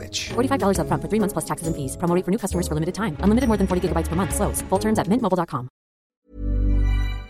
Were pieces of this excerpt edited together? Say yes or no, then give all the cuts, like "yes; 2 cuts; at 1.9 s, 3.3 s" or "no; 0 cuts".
yes; 1 cut; at 6.1 s